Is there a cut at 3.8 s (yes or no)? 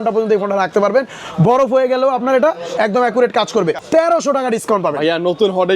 yes